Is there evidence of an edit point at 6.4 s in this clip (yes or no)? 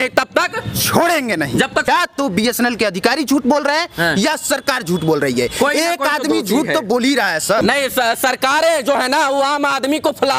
no